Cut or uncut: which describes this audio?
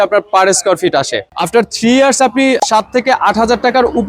cut